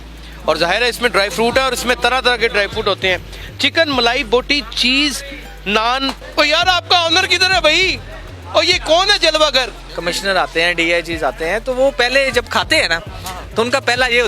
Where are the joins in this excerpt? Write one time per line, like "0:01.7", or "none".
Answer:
0:06.2
0:09.8